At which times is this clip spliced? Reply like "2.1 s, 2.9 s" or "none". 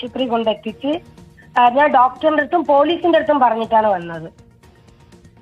none